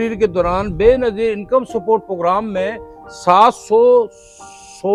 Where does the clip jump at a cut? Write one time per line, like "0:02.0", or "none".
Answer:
none